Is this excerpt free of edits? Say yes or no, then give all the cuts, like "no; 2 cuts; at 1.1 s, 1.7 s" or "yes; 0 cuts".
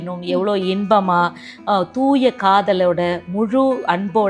yes; 0 cuts